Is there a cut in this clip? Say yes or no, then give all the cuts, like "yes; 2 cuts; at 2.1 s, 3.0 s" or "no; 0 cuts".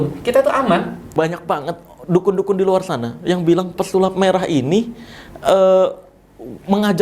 yes; 1 cut; at 1.1 s